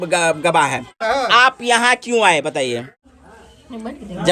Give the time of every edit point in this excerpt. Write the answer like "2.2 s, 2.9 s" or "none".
1.0 s, 2.9 s